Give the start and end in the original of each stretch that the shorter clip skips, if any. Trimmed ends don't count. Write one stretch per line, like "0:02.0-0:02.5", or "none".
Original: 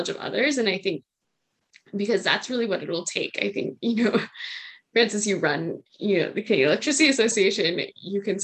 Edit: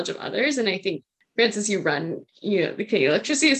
0:01.1-0:04.7